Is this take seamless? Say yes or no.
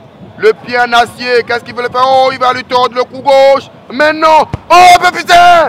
yes